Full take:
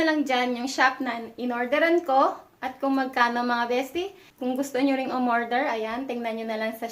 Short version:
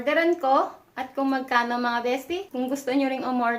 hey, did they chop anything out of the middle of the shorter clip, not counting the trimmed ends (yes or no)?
yes